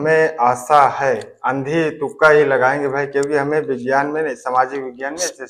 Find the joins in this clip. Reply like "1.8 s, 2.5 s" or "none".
none